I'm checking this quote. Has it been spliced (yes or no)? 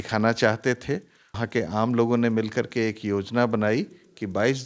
yes